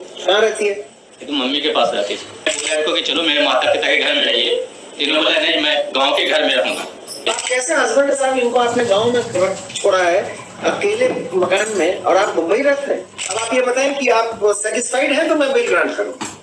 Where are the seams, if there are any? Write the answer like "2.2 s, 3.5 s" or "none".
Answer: 2.6 s, 7.4 s, 13.4 s